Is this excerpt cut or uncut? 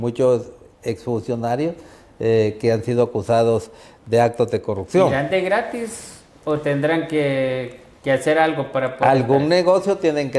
uncut